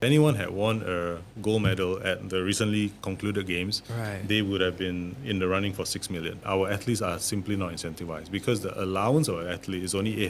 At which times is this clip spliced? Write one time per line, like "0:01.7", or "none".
0:03.0
0:06.4